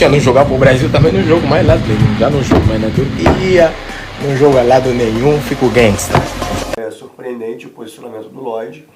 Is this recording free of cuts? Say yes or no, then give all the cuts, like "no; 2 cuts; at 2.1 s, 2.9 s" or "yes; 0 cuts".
no; 1 cut; at 6.6 s